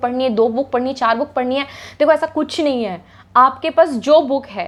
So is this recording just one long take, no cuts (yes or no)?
yes